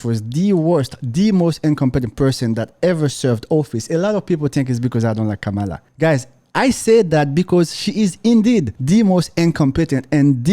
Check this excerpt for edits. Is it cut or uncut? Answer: cut